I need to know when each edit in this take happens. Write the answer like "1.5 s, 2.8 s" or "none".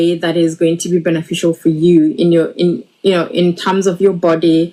none